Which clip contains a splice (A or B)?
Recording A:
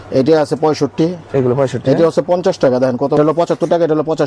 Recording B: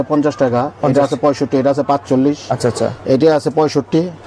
A